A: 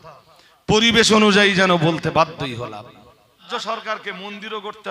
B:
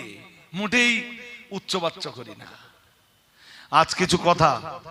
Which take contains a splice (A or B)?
A